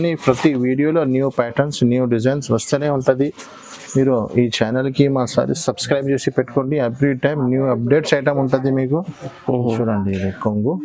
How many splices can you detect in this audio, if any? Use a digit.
0